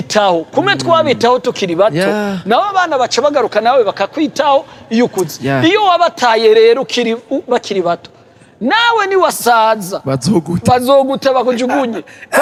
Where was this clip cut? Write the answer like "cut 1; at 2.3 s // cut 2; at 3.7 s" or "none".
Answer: none

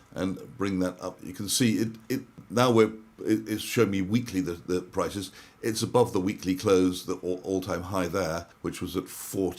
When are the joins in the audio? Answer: cut 1; at 2.4 s // cut 2; at 8.5 s

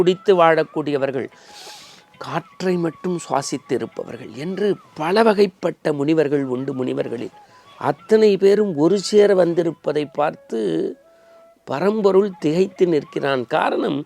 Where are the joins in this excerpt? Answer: none

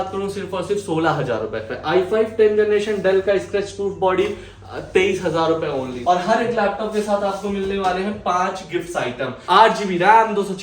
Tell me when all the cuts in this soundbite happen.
cut 1; at 1.7 s // cut 2; at 5.9 s // cut 3; at 9.3 s

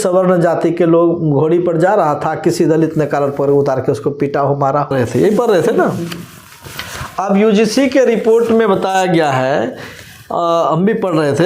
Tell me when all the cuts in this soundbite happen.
cut 1; at 4.9 s

